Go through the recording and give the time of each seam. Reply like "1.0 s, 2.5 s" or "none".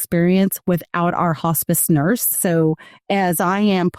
2.4 s